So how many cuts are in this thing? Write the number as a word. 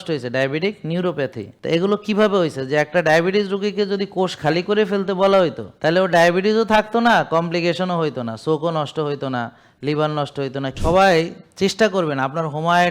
three